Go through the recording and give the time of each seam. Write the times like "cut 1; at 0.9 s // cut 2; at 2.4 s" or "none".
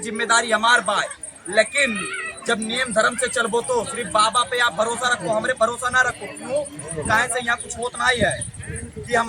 none